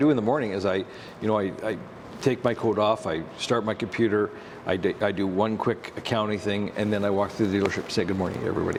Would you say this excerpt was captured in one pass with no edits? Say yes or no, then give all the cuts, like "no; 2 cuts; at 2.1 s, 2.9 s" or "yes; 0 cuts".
yes; 0 cuts